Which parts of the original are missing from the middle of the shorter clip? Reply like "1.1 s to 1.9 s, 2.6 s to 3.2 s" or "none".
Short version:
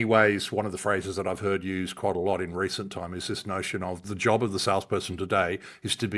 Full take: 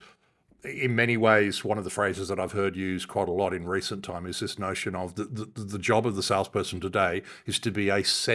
5.1 s to 5.6 s